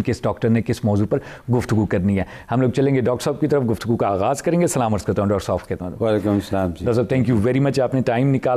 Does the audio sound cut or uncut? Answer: uncut